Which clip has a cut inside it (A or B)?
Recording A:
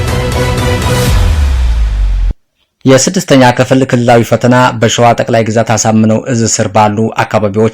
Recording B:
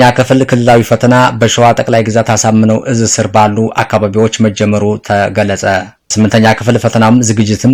A